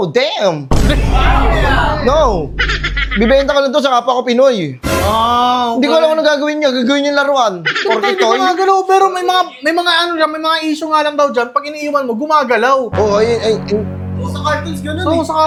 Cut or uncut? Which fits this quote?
uncut